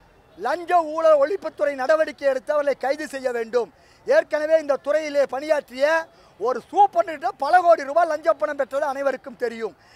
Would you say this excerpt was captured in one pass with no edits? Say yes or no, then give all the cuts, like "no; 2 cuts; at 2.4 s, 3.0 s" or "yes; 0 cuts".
yes; 0 cuts